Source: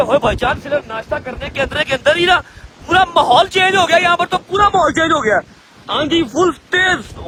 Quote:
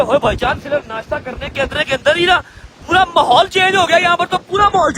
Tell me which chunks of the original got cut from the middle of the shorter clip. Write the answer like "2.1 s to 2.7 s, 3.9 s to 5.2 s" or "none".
none